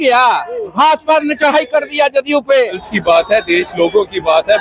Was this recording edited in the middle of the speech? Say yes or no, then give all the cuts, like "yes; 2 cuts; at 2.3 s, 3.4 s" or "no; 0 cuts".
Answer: yes; 1 cut; at 2.9 s